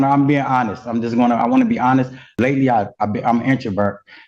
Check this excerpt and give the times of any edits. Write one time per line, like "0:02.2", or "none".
0:02.3